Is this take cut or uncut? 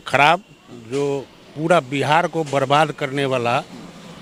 uncut